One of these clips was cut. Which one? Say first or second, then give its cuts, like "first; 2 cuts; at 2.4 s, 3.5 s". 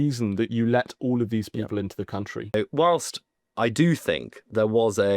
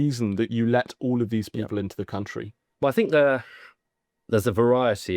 first; 1 cut; at 2.5 s